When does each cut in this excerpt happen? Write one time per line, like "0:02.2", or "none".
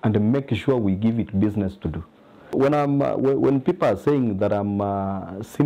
0:02.5